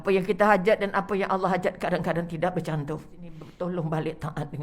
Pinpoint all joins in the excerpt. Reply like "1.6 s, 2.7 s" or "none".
3.4 s